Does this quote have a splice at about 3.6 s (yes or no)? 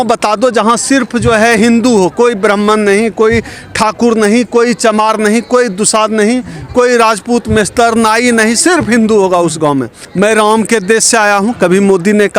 no